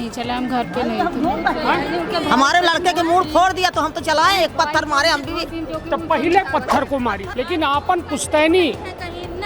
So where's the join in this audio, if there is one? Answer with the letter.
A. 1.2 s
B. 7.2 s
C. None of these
B